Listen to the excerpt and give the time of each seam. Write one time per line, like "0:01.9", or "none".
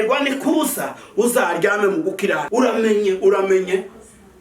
0:02.4